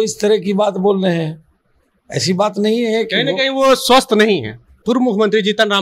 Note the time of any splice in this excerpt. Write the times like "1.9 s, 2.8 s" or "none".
4.8 s